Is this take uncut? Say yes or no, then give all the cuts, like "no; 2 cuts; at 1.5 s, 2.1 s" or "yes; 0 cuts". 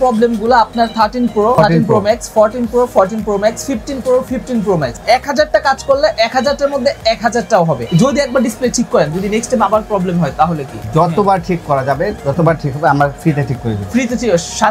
no; 4 cuts; at 1.5 s, 5.0 s, 7.8 s, 10.8 s